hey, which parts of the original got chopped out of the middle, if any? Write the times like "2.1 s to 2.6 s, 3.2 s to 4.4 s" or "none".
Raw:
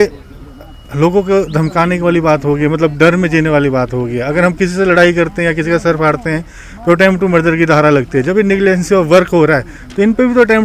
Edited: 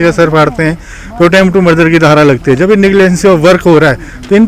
none